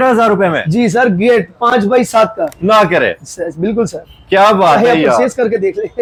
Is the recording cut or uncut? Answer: uncut